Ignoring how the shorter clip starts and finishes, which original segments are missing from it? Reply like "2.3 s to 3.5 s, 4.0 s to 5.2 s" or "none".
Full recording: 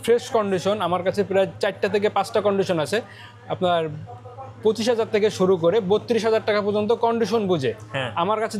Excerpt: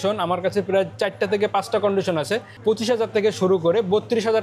3.1 s to 4.5 s

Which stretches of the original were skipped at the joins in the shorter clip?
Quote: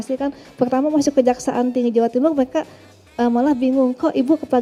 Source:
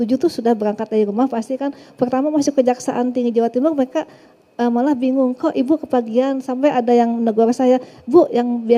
none

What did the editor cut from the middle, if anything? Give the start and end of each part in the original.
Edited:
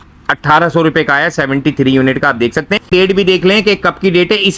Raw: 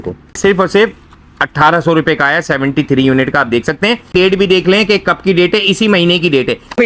3.9 s to 4.0 s

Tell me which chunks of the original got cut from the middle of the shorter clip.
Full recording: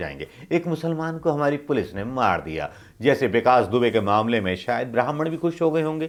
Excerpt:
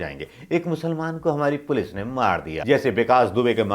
2.5 s to 2.9 s

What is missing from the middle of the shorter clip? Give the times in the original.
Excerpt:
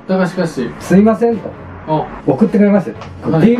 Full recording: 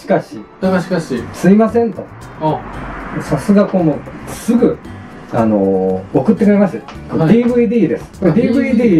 2.7 s to 6.0 s

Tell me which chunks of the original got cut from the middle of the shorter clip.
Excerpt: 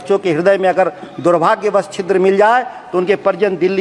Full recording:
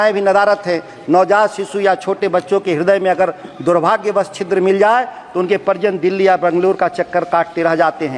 none

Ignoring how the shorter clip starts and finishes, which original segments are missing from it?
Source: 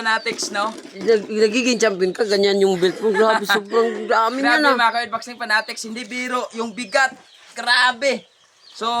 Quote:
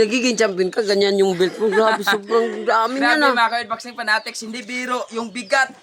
none

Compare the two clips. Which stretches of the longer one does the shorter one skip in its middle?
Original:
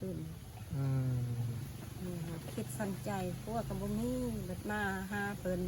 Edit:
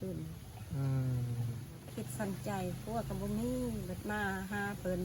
1.8 s to 2.4 s

